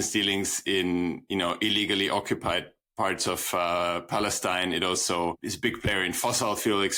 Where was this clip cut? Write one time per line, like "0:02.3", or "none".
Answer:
none